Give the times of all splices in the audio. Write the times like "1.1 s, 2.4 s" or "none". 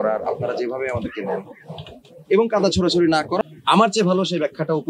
3.4 s